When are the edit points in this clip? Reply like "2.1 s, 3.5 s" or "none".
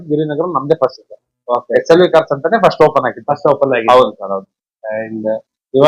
none

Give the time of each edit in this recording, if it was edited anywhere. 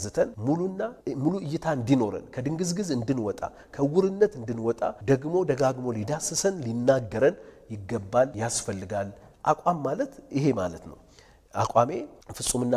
9.2 s

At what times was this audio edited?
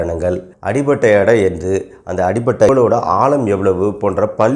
2.7 s

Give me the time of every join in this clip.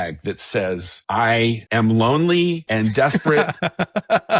0.9 s, 1.6 s, 2.6 s

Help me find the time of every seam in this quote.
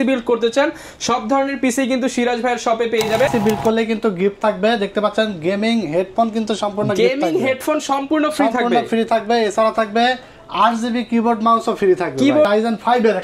3.3 s, 12.5 s

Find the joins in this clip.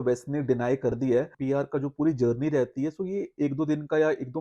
1.4 s

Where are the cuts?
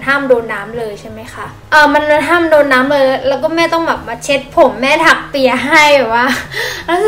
none

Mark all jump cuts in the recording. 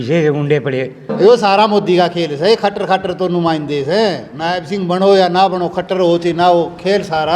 1.1 s, 4.3 s

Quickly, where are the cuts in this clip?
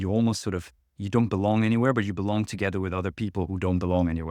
none

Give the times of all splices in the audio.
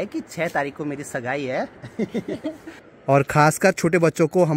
2.9 s

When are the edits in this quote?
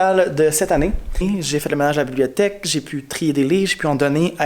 1.2 s

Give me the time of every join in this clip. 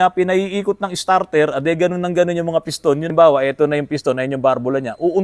3.1 s

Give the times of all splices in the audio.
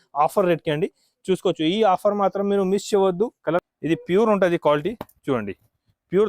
3.6 s

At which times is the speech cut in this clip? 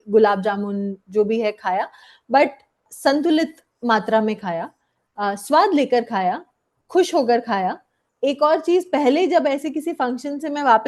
2.8 s, 8.0 s

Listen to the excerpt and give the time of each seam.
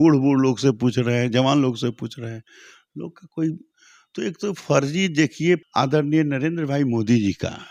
5.7 s

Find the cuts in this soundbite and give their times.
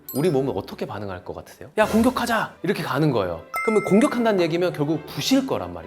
1.7 s, 3.5 s

